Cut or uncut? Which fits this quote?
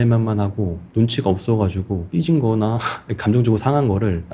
cut